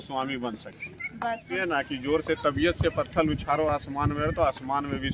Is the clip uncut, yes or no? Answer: no